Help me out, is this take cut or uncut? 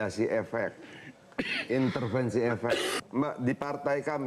cut